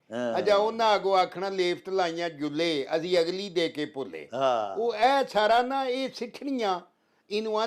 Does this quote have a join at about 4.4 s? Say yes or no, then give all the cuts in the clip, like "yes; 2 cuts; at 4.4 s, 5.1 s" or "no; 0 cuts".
no; 0 cuts